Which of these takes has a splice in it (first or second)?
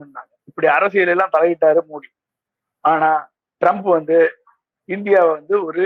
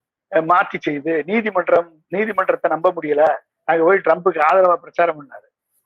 second